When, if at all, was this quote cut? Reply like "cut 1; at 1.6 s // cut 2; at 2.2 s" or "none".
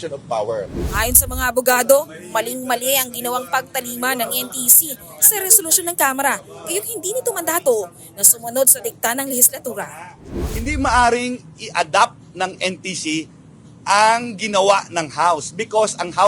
cut 1; at 0.9 s // cut 2; at 10.4 s